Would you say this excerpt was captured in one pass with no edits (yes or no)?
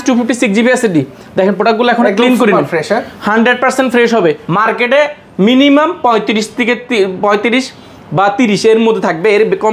no